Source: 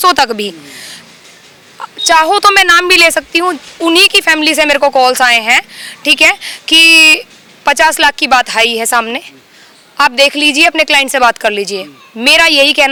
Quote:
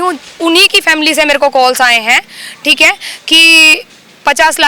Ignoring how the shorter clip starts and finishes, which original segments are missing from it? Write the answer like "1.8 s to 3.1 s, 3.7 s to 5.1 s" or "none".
none